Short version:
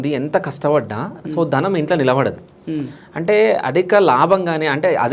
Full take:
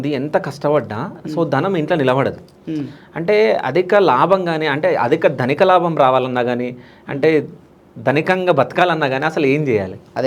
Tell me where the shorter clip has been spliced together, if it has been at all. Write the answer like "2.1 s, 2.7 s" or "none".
none